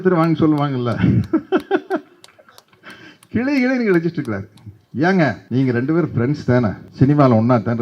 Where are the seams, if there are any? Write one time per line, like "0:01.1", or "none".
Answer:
0:05.4
0:06.8